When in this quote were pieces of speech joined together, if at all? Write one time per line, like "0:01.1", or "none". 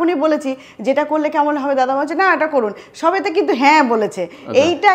none